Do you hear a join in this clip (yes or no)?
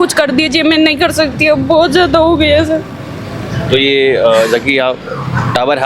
no